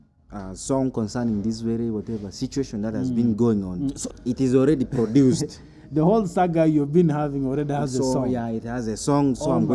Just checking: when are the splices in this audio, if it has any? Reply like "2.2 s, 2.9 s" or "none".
4.0 s